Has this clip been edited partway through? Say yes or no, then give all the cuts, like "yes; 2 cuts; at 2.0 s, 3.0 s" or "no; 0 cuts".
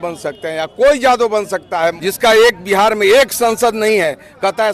yes; 1 cut; at 2.0 s